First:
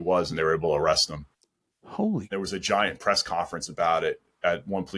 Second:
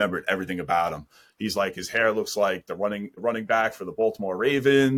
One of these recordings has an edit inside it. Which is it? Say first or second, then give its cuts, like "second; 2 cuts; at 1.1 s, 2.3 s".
first; 1 cut; at 2.2 s